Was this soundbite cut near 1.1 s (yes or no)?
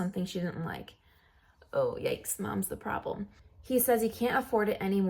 no